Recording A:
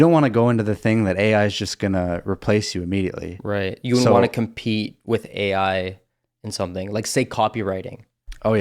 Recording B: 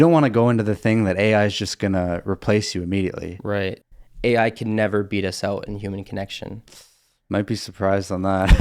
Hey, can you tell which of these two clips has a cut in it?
B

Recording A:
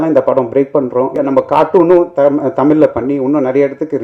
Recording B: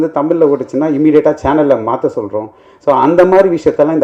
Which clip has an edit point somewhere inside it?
A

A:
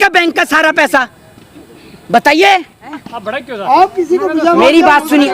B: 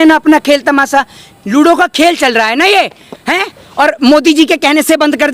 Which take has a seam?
A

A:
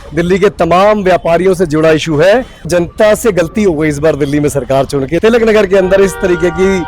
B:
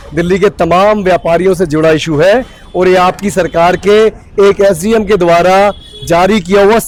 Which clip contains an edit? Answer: A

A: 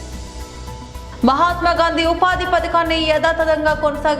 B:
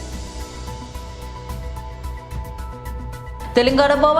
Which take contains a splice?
B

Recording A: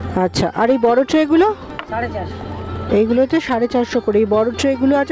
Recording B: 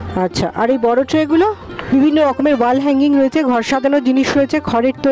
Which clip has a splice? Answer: B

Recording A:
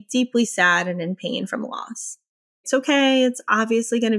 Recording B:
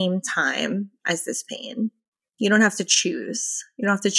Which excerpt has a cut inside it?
A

